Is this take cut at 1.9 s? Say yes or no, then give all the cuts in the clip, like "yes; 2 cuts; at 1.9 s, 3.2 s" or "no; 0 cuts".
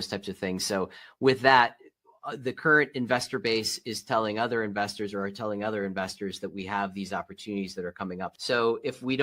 no; 1 cut; at 8.3 s